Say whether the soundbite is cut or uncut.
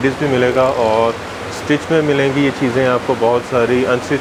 uncut